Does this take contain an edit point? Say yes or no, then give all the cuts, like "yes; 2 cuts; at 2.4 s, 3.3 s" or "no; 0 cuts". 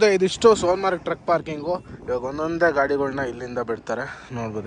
no; 0 cuts